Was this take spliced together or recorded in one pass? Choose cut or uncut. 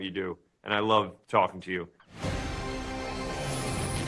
cut